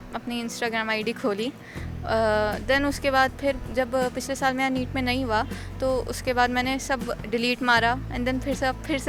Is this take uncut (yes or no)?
yes